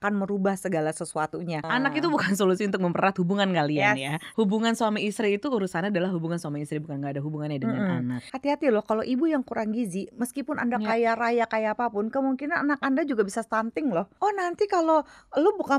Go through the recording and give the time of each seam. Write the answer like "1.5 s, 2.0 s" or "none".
1.6 s, 4.2 s, 8.3 s, 14.1 s